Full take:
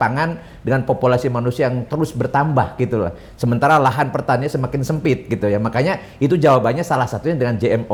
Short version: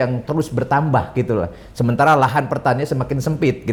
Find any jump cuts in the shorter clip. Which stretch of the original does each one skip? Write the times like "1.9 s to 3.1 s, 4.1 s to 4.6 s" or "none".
none